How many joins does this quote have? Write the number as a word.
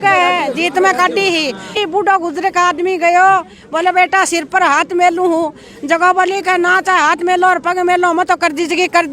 one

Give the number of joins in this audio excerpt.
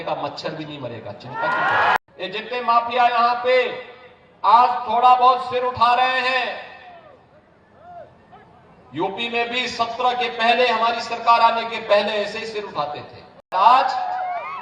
two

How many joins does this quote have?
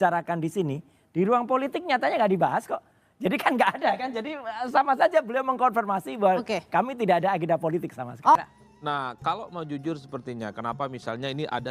one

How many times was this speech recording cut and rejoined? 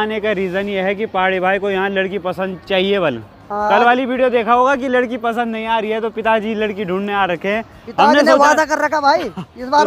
zero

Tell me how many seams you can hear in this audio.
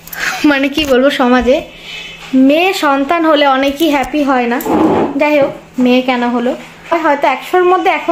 one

